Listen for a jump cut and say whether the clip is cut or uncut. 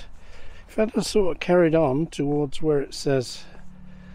uncut